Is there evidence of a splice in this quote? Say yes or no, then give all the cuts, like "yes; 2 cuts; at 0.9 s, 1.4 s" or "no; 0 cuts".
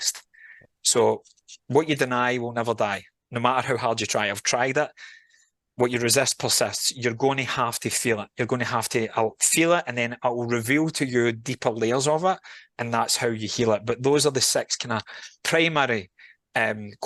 no; 0 cuts